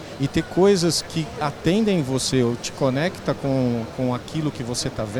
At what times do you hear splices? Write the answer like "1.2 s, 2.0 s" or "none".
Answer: none